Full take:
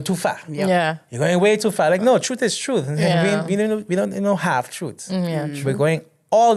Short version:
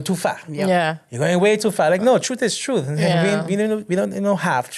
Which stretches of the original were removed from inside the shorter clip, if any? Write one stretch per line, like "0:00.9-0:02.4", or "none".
none